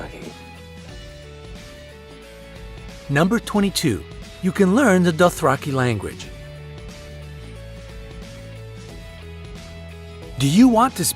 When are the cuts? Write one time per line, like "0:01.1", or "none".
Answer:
0:02.3